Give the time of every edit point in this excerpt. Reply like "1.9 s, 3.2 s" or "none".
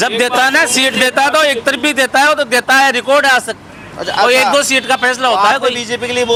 none